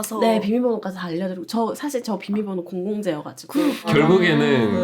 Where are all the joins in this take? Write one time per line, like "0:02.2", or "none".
0:03.8

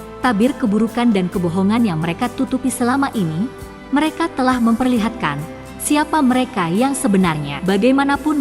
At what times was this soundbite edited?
0:07.5

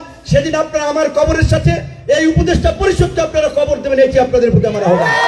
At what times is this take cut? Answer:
none

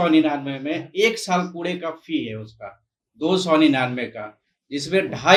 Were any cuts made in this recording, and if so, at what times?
none

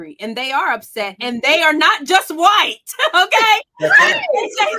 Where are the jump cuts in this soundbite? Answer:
none

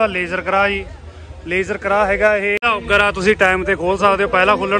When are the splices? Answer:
0:02.6

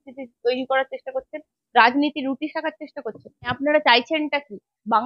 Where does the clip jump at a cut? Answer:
0:03.6

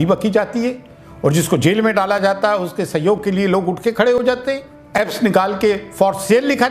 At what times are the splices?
0:04.7

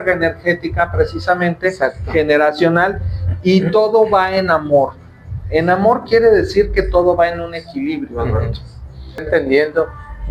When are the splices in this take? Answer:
0:09.2

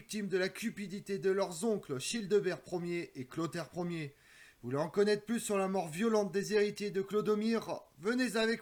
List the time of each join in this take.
none

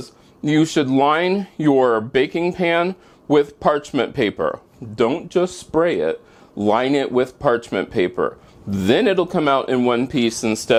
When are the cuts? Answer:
none

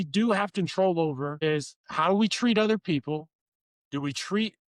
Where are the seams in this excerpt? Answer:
0:01.3

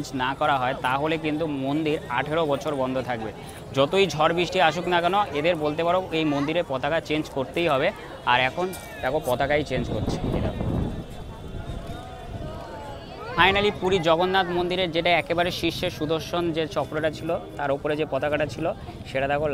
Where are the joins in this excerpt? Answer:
none

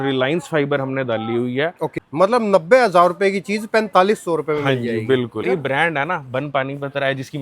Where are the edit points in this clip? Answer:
0:01.9
0:05.5

